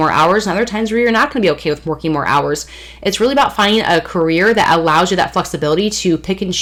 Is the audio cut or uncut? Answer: uncut